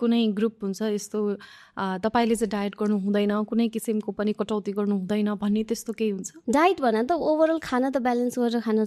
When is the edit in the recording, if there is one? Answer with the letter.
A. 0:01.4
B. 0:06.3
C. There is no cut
B